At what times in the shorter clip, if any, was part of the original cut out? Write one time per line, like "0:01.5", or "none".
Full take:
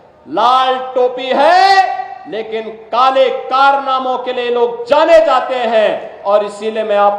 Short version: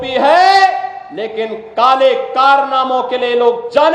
none